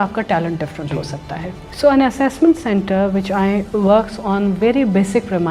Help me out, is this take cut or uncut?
cut